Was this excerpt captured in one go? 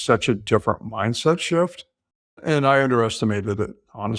no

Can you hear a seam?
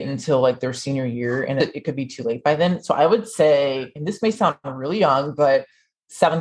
yes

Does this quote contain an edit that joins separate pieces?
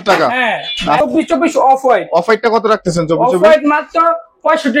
yes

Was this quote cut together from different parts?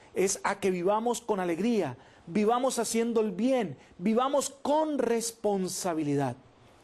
yes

